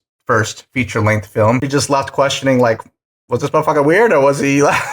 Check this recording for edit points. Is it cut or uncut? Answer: cut